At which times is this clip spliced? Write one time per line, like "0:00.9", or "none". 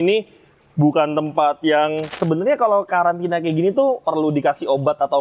0:02.1